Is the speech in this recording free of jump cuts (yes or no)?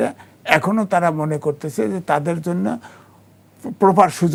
yes